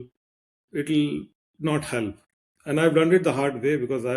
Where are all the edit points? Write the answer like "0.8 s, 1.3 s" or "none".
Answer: 2.3 s